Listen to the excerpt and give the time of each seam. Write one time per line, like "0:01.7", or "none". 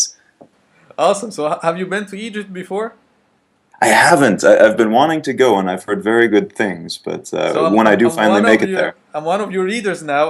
0:08.7